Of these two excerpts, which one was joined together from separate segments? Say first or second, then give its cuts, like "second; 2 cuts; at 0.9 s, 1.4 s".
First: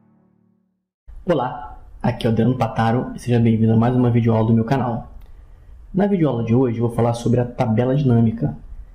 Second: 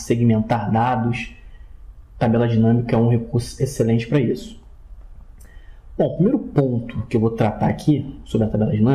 second; 1 cut; at 5.8 s